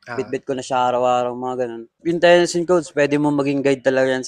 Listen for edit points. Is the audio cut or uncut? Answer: cut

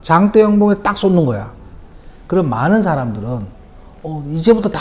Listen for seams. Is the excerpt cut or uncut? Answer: uncut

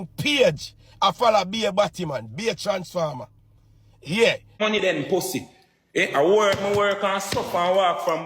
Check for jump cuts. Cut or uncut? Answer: cut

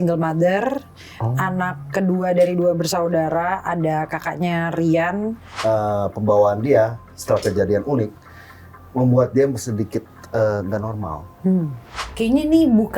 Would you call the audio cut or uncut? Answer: cut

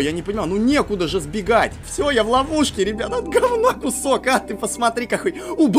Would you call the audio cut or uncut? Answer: cut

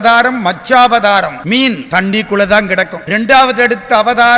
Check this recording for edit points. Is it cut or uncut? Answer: uncut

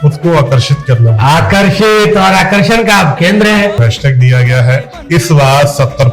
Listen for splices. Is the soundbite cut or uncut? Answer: cut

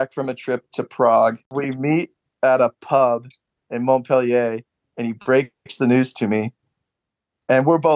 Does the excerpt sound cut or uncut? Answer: cut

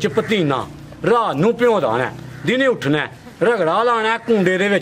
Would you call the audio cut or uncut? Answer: uncut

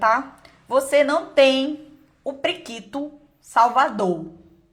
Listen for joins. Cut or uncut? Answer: uncut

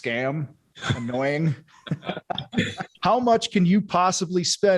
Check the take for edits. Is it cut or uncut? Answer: cut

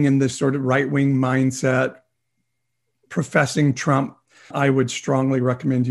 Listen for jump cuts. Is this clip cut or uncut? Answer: cut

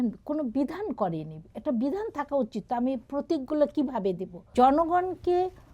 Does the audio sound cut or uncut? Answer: cut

